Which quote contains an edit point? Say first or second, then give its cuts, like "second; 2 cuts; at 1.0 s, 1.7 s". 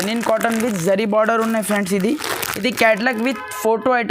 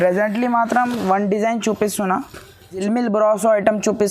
second; 1 cut; at 2.8 s